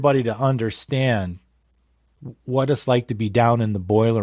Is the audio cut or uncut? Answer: uncut